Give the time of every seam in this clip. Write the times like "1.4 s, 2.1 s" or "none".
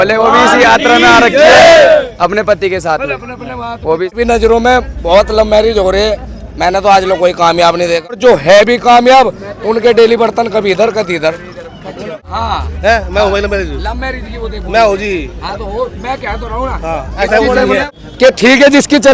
4.2 s, 8.2 s, 12.1 s, 18.0 s